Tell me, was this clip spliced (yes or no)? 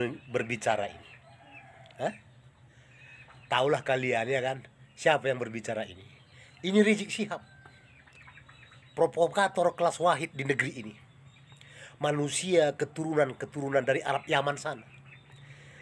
no